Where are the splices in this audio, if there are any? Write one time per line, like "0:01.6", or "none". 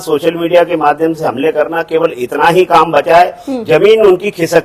none